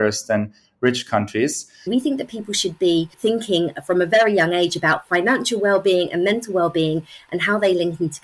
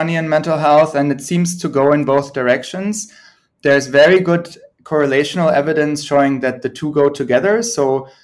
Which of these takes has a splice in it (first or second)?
first